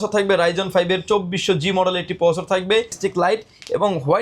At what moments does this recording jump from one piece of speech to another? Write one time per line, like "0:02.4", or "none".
0:03.0